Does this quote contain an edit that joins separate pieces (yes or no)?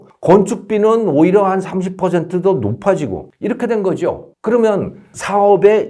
no